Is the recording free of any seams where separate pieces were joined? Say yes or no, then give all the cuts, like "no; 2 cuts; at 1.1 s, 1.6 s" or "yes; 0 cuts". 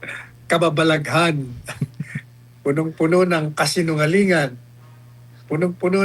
yes; 0 cuts